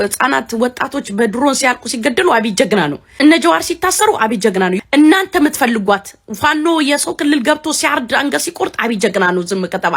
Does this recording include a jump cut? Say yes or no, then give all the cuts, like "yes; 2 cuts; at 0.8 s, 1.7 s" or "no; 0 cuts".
yes; 2 cuts; at 3.1 s, 4.8 s